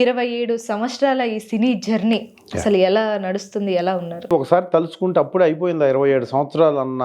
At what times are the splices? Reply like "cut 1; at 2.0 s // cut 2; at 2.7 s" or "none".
cut 1; at 4.3 s